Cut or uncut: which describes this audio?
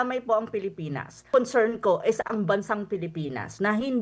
cut